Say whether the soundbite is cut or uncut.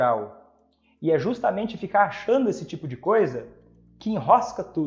uncut